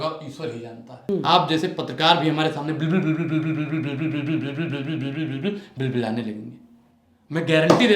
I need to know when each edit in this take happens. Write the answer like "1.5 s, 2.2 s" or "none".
1.1 s